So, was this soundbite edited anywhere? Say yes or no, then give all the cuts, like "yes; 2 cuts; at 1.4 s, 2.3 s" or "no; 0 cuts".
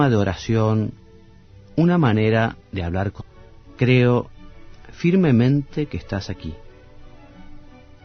no; 0 cuts